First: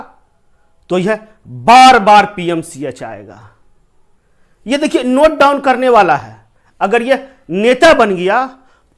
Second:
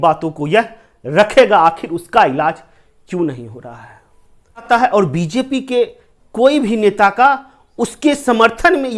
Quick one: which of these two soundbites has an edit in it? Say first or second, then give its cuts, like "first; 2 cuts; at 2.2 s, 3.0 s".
second; 1 cut; at 4.7 s